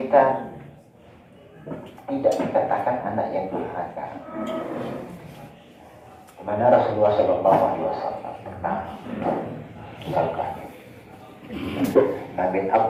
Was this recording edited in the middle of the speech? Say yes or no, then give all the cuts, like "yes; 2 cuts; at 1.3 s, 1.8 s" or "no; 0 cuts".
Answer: no; 0 cuts